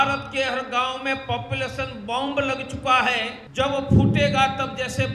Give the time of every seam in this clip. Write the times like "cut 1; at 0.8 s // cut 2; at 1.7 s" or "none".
cut 1; at 3.4 s